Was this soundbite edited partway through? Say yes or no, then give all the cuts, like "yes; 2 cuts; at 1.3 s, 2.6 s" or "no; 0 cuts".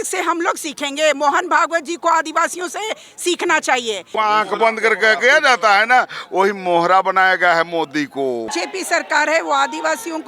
yes; 2 cuts; at 4.1 s, 8.5 s